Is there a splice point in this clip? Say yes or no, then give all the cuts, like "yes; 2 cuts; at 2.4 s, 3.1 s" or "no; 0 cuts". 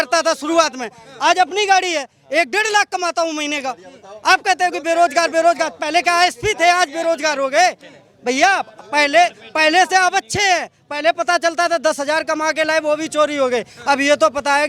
no; 0 cuts